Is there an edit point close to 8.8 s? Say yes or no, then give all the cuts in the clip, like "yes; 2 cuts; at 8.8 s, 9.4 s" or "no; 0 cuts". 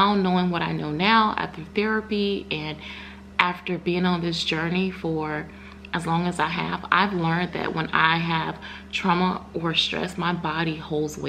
no; 0 cuts